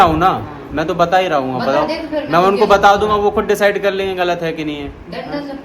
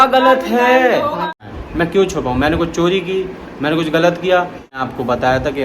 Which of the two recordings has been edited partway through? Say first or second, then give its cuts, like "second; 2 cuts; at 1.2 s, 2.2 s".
second; 2 cuts; at 1.4 s, 4.8 s